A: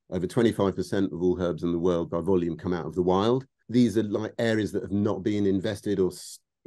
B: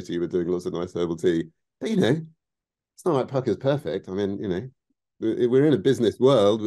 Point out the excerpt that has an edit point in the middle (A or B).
A